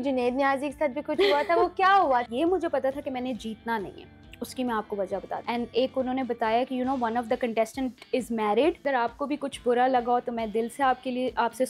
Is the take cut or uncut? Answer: cut